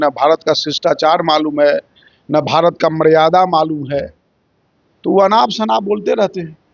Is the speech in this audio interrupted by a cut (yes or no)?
no